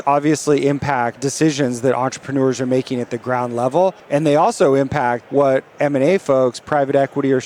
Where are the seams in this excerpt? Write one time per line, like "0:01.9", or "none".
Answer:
0:01.1
0:04.0
0:05.2